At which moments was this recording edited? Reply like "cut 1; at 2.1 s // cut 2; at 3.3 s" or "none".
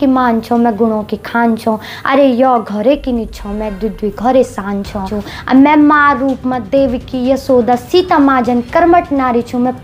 cut 1; at 5.2 s